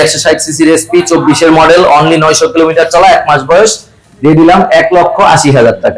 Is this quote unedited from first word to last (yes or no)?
yes